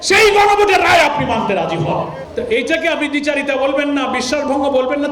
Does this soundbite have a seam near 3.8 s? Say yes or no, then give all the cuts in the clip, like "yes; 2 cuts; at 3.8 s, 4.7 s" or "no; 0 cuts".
no; 1 cut; at 2.2 s